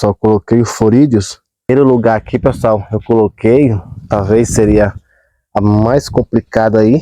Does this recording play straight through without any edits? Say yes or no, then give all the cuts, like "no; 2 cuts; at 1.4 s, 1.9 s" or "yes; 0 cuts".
no; 1 cut; at 1.7 s